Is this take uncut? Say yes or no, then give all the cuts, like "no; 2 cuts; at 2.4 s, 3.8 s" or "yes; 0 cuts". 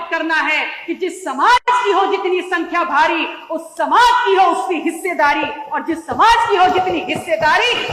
yes; 0 cuts